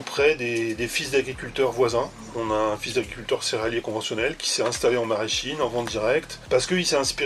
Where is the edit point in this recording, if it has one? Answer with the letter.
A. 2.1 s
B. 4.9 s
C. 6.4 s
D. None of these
C